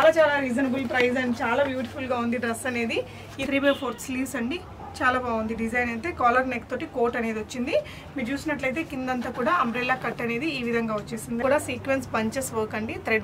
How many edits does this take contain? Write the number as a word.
two